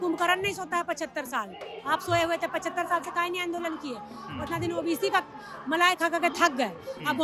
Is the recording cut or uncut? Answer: uncut